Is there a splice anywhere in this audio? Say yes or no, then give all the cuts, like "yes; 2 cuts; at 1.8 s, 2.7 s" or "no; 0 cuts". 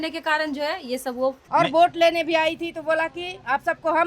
yes; 1 cut; at 1.4 s